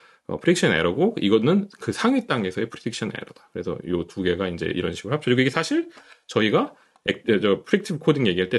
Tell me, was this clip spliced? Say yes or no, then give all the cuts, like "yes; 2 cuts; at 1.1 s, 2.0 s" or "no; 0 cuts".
no; 0 cuts